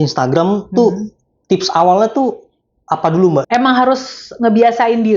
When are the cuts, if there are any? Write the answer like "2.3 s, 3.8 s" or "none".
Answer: 3.5 s